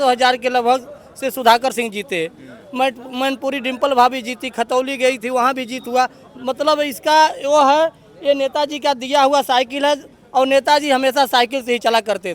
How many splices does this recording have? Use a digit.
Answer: 0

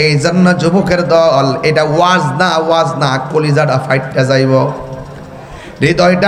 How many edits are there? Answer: 0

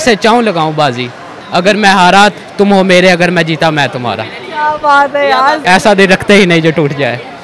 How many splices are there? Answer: 2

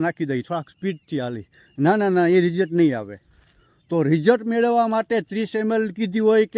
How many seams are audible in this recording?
0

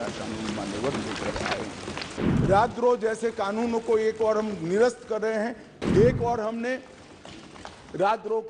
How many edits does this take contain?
2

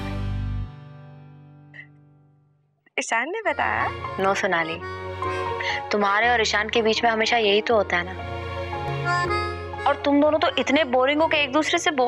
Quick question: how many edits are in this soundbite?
1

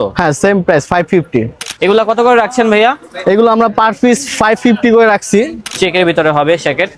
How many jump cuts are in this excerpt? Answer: 2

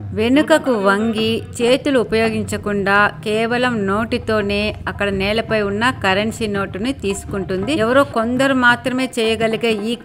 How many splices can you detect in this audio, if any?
0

